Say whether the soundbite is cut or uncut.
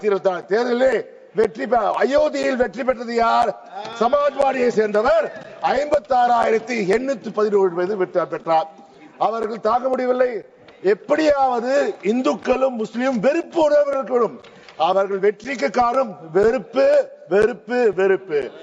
uncut